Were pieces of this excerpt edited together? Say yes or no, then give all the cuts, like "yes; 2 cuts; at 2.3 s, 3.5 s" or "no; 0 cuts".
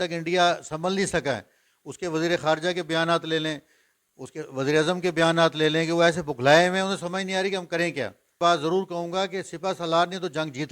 yes; 1 cut; at 8.4 s